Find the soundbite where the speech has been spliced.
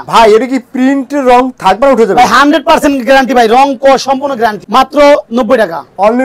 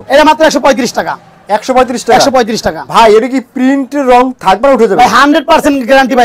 first; 1 cut; at 4.6 s

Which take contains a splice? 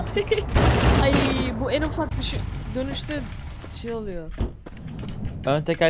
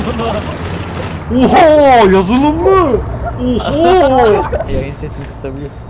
second; 1 cut; at 4.6 s

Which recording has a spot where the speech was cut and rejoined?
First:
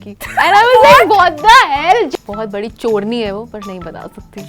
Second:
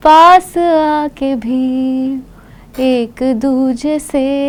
first; 1 cut; at 2.1 s

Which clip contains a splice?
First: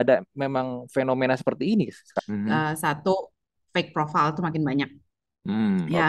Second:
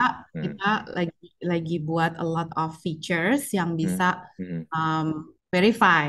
first; 1 cut; at 2.1 s

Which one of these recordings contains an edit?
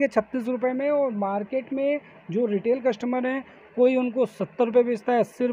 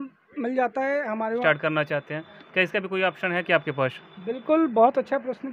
second; 1 cut; at 1.4 s

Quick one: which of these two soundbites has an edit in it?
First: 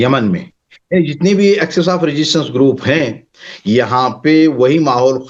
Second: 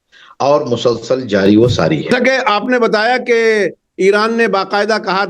second; 1 cut; at 2.1 s

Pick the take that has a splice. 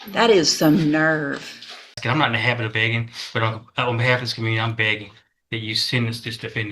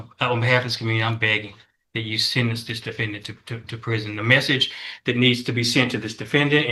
first; 1 cut; at 2.0 s

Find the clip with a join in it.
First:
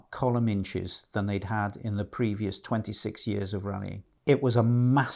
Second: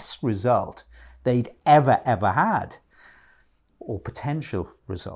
first; 1 cut; at 4.1 s

